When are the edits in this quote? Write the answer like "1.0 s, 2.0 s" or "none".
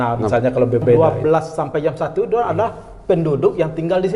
1.0 s